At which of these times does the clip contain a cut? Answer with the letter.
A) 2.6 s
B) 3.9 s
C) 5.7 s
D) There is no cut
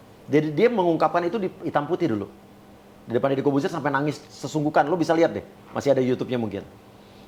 D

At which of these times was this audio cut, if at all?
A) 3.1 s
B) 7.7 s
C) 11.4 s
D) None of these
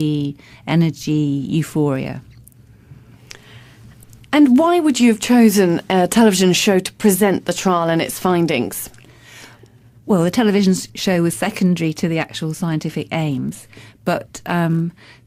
D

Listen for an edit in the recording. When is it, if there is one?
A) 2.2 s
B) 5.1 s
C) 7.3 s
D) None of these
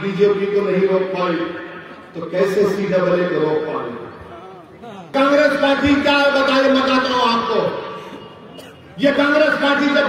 B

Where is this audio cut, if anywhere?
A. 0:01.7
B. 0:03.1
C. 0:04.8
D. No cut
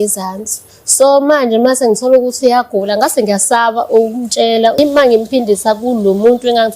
C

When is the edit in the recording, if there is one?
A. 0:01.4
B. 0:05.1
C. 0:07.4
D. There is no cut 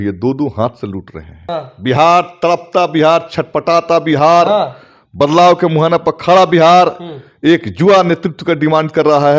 A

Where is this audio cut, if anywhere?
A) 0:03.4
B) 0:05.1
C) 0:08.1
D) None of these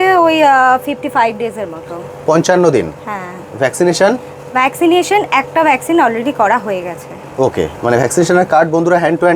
D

